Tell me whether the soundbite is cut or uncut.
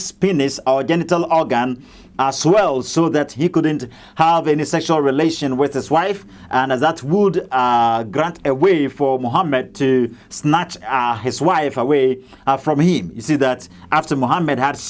uncut